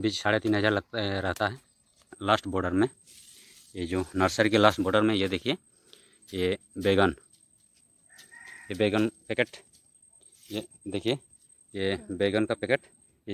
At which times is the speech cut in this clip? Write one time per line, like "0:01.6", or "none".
0:02.2